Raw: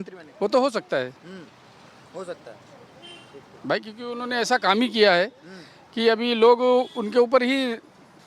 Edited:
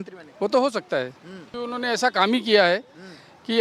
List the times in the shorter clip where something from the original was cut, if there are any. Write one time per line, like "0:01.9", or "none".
0:01.5